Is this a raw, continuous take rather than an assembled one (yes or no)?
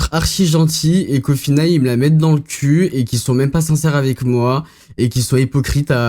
yes